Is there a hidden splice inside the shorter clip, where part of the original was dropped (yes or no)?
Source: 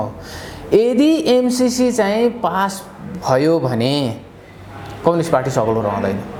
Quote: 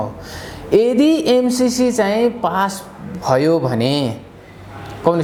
no